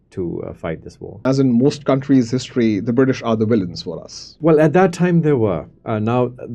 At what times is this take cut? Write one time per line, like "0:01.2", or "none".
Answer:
0:01.2
0:04.3